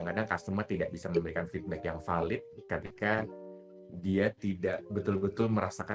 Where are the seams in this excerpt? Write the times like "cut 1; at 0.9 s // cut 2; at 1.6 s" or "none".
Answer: none